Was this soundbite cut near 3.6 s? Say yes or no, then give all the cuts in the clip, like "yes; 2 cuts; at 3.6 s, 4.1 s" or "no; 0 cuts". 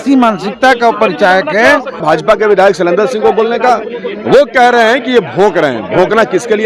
no; 1 cut; at 2.0 s